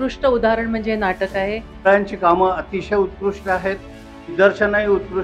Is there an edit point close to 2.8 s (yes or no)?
no